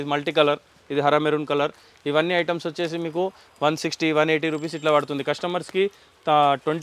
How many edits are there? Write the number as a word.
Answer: zero